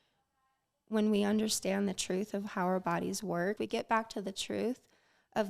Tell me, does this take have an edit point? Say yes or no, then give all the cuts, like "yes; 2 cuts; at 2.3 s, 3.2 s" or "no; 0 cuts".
yes; 1 cut; at 3.6 s